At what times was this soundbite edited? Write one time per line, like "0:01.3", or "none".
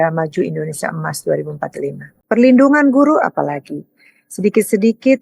0:02.1